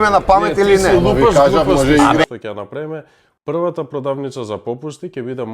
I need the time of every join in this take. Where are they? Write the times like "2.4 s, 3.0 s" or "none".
2.2 s